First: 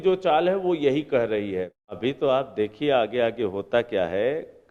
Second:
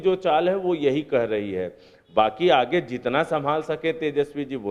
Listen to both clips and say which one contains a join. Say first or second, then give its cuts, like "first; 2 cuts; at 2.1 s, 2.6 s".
first; 1 cut; at 2.0 s